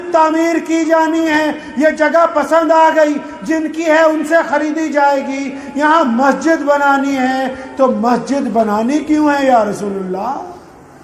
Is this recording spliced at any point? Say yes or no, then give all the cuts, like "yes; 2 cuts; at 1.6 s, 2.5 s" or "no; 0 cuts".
no; 0 cuts